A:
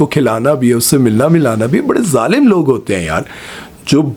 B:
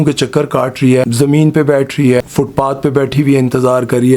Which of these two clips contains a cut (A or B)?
B